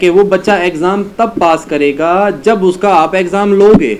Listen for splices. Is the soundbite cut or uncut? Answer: uncut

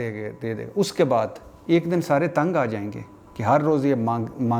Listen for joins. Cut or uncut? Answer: uncut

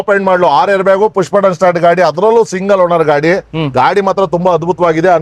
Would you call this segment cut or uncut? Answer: uncut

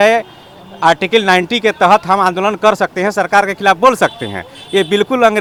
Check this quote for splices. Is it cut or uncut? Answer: uncut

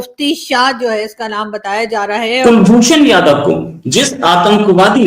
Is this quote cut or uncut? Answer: cut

